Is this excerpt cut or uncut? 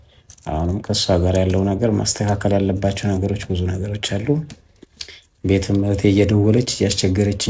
uncut